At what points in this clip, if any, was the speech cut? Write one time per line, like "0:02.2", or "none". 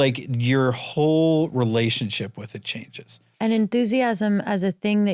0:03.2